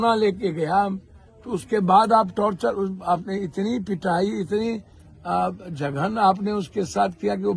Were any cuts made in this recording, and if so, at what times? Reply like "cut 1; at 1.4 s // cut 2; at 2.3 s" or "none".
none